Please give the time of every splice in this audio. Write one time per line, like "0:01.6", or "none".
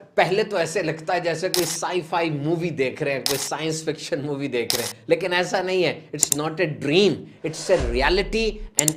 none